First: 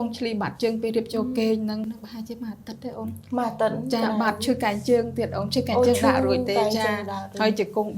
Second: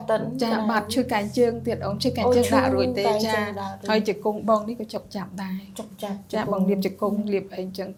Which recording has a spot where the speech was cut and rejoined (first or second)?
first